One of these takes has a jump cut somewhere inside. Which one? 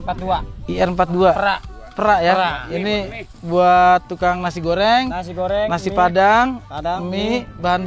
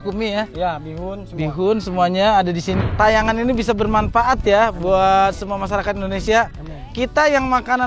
second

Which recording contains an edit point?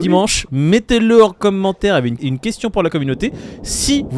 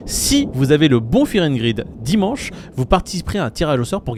first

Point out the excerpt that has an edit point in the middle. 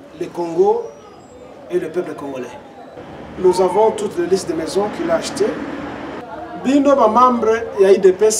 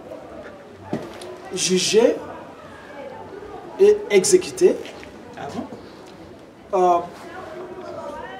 first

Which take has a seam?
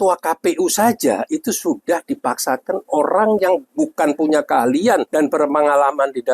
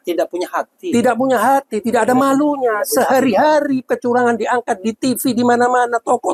first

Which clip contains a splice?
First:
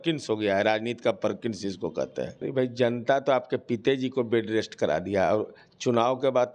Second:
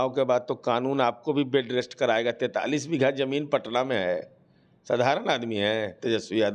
first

